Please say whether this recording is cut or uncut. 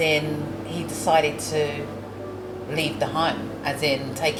uncut